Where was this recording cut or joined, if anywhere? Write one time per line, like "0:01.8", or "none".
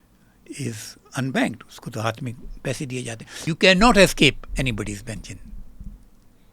0:03.5